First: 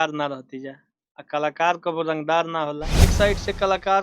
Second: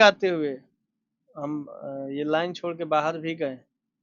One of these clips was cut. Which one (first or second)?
first